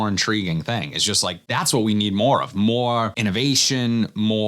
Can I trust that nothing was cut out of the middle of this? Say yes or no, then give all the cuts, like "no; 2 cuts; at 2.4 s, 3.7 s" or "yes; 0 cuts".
no; 2 cuts; at 1.4 s, 3.1 s